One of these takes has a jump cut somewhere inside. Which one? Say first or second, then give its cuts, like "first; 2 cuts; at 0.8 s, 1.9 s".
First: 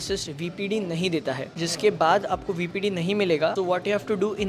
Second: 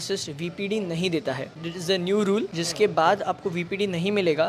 first; 1 cut; at 1.5 s